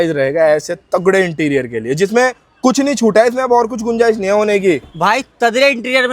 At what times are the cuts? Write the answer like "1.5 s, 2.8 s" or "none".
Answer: none